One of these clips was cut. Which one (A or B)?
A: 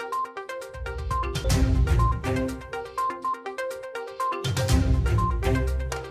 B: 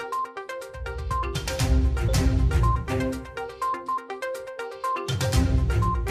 A